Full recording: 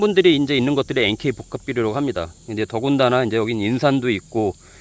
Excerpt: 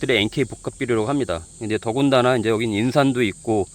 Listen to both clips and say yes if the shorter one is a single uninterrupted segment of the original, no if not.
yes